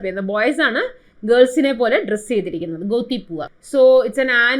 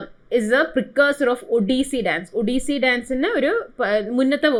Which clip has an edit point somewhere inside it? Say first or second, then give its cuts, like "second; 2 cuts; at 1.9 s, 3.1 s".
first; 1 cut; at 3.6 s